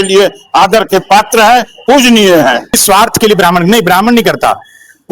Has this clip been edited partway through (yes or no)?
yes